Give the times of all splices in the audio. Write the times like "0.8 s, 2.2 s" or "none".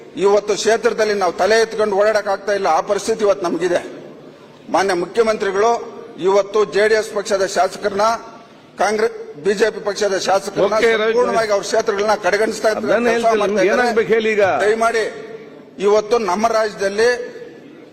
none